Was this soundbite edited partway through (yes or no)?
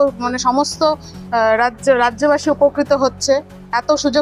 no